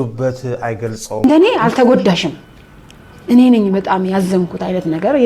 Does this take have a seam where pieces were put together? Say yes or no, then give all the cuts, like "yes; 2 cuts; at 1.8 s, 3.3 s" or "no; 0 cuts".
yes; 1 cut; at 1.2 s